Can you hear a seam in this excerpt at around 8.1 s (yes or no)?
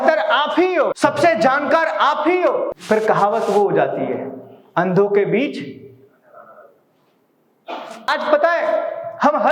yes